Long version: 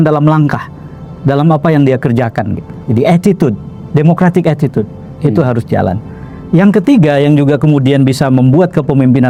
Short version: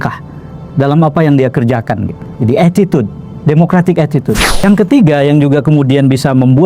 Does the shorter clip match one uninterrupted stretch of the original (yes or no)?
no